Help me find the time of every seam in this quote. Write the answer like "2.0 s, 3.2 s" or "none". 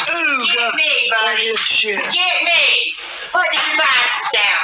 none